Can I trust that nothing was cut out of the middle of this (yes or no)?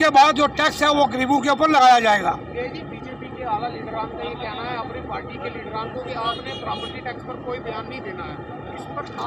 yes